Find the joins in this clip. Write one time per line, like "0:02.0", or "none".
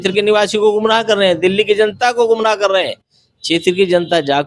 none